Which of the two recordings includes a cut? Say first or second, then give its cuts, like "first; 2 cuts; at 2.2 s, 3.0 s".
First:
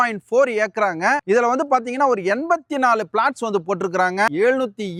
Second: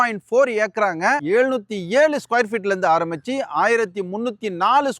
second; 1 cut; at 1.2 s